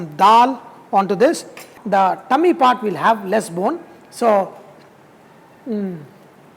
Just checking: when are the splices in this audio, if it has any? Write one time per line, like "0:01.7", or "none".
0:01.7